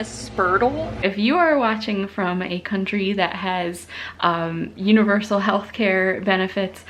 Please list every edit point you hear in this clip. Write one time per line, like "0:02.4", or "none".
0:01.0